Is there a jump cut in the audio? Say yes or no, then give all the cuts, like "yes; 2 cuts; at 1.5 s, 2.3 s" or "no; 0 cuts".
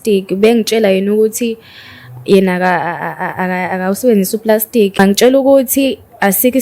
yes; 1 cut; at 5.0 s